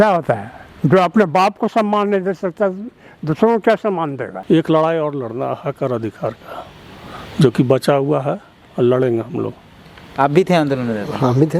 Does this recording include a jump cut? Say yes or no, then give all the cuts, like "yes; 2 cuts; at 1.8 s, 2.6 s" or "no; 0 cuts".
yes; 1 cut; at 4.3 s